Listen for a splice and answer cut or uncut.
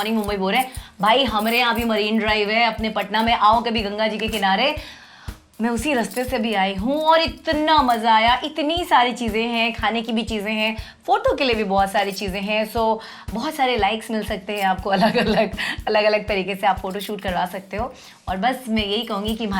uncut